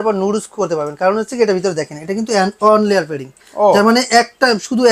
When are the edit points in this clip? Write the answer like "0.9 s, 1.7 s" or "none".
none